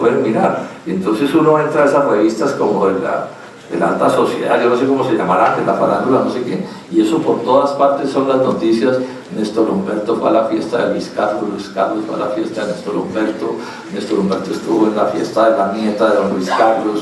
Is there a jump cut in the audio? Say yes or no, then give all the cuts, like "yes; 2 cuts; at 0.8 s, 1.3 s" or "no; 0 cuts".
yes; 1 cut; at 12.7 s